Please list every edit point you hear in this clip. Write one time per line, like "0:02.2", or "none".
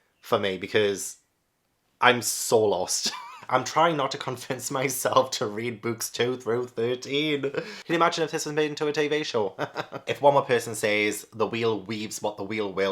0:03.3
0:07.8
0:10.0